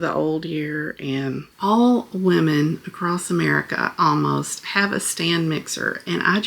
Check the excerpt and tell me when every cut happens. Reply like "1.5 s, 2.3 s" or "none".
1.4 s